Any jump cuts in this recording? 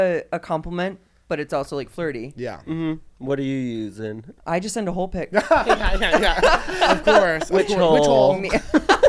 no; 0 cuts

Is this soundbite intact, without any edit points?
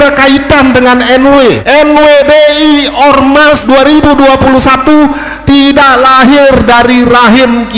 no; 2 cuts; at 1.6 s, 3.6 s

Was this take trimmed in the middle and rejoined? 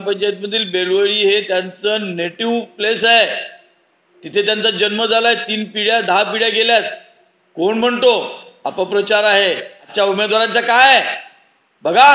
yes; 1 cut; at 9.8 s

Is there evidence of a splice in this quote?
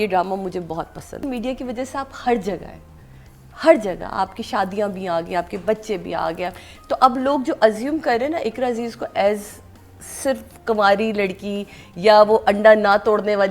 yes; 1 cut; at 1.2 s

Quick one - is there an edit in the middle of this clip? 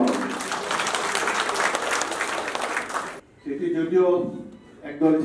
yes; 1 cut; at 3.2 s

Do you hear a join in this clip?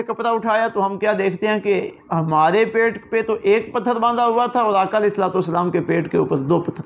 no; 0 cuts

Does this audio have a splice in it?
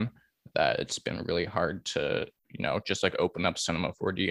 yes; 1 cut; at 2.4 s

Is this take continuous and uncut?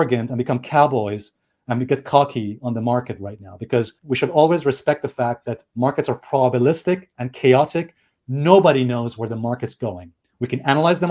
yes; 0 cuts

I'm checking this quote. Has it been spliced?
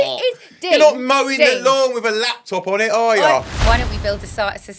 yes; 1 cut; at 3.5 s

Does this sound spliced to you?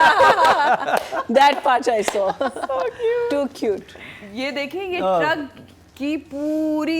no; 0 cuts

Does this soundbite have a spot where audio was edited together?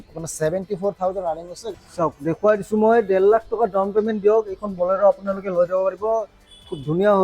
yes; 1 cut; at 1.7 s

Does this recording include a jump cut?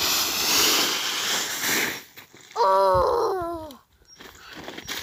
no; 0 cuts

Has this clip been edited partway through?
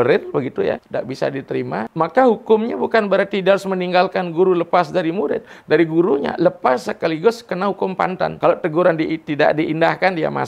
yes; 3 cuts; at 0.8 s, 1.9 s, 8.3 s

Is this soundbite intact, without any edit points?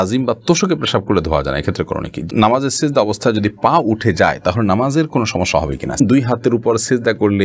no; 2 cuts; at 2.3 s, 6.0 s

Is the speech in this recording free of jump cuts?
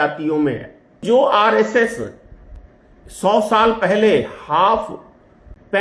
no; 1 cut; at 1.0 s

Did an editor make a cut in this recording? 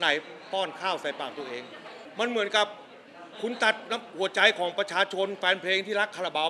yes; 1 cut; at 1.9 s

